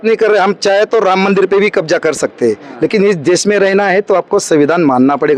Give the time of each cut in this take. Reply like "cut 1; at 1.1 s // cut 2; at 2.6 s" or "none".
cut 1; at 2.7 s